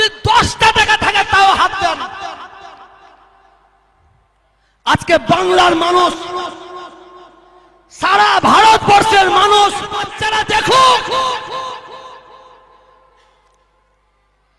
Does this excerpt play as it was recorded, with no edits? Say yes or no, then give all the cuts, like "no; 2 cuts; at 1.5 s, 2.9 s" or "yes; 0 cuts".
no; 1 cut; at 10.2 s